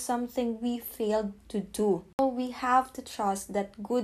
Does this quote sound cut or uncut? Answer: cut